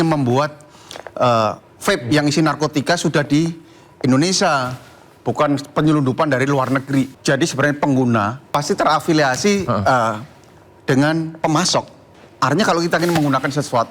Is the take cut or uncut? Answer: cut